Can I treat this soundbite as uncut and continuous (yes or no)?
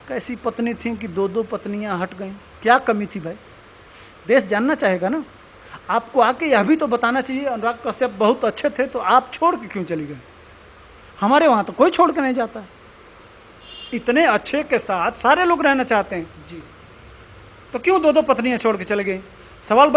yes